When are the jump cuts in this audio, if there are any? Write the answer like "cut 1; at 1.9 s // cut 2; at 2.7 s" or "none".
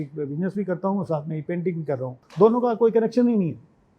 cut 1; at 2.2 s